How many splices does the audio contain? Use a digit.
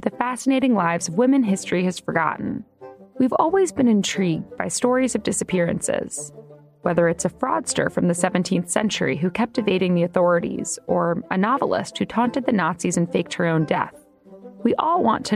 1